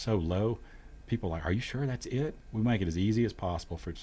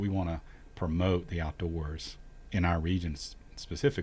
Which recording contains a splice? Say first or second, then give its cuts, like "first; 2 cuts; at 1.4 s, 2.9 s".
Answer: first; 1 cut; at 2.4 s